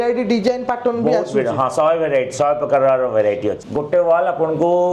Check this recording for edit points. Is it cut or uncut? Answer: cut